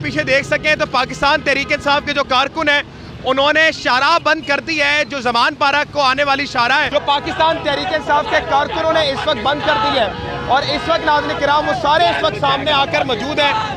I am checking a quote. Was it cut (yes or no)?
no